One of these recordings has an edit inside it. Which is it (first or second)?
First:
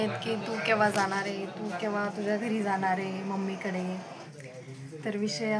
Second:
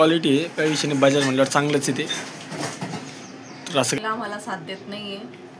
second